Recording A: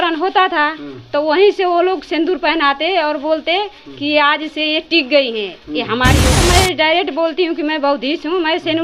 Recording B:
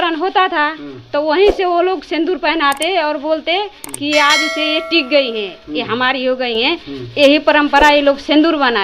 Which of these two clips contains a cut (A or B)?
A